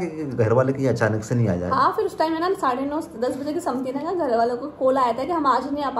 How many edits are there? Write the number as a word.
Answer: zero